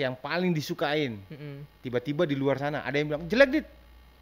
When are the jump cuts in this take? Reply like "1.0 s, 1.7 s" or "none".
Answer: none